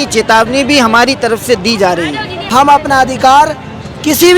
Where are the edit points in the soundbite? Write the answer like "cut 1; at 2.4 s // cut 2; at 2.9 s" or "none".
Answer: cut 1; at 2.5 s